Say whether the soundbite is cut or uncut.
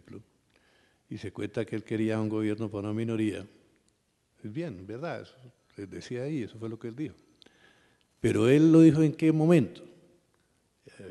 uncut